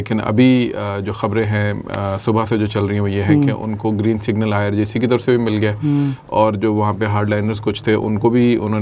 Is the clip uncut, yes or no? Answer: yes